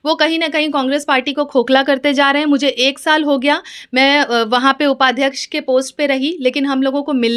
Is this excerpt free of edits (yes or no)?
yes